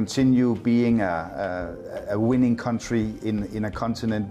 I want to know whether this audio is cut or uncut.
uncut